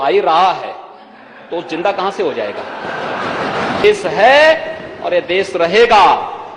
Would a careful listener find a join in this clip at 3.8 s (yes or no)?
yes